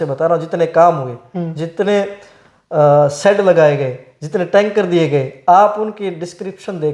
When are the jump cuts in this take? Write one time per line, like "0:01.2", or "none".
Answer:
none